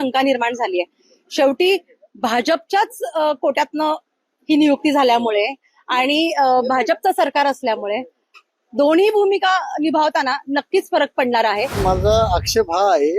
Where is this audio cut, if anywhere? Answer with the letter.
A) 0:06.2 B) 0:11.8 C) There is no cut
B